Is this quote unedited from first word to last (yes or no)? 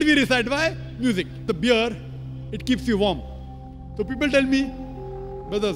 no